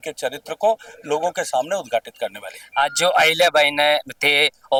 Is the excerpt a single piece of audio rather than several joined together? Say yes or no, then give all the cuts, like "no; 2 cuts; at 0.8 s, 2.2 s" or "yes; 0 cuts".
yes; 0 cuts